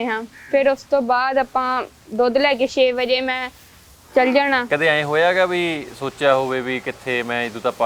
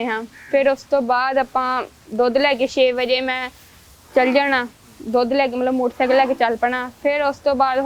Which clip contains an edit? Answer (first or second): first